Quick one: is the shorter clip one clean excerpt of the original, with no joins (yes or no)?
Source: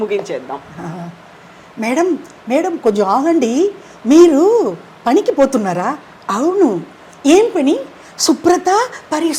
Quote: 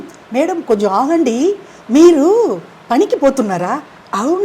yes